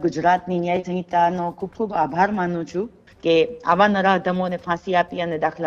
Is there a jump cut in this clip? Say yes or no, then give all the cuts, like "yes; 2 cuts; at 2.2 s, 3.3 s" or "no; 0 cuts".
yes; 1 cut; at 3.0 s